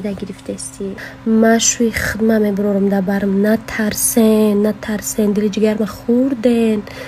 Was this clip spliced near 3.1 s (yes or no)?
no